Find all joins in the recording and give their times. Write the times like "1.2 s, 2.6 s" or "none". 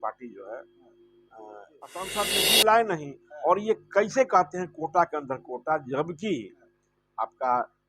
2.0 s